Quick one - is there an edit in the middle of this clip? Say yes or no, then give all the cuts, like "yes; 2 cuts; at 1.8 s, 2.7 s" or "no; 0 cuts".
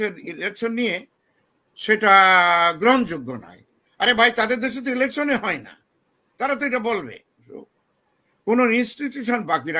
yes; 1 cut; at 7.6 s